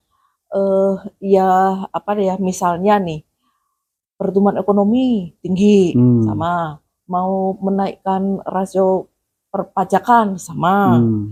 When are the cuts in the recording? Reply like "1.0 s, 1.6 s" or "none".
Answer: none